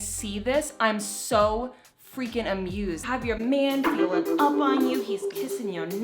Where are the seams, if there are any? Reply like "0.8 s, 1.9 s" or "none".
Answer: 3.0 s